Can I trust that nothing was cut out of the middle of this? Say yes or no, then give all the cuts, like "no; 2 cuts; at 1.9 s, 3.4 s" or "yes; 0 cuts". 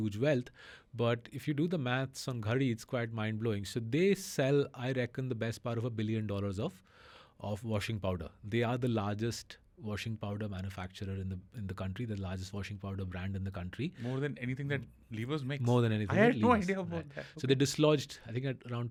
yes; 0 cuts